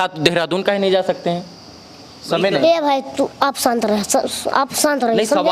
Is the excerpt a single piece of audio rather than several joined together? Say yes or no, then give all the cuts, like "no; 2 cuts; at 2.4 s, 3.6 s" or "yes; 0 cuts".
yes; 0 cuts